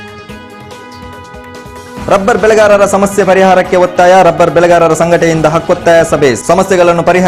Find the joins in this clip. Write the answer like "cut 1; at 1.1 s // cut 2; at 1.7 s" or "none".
cut 1; at 1.0 s